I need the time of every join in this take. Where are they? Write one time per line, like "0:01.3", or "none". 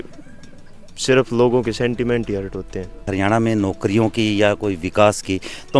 0:03.1